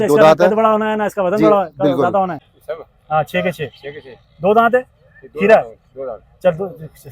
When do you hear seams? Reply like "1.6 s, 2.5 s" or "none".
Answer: 2.4 s